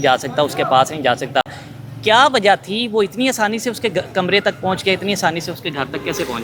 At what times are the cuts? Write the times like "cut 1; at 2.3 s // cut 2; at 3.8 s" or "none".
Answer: none